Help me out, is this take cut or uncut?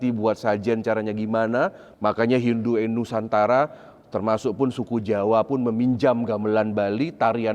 cut